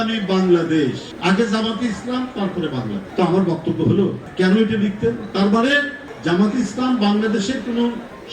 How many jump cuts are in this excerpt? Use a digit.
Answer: 2